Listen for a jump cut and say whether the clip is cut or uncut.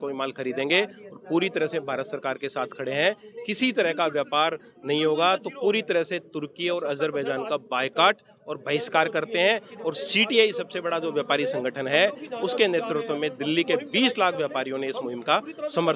uncut